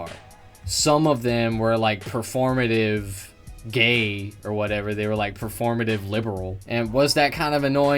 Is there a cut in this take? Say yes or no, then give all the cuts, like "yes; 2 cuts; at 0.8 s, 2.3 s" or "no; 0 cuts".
yes; 1 cut; at 6.6 s